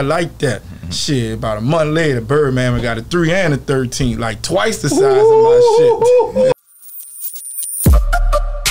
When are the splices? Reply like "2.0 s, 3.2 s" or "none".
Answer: 6.6 s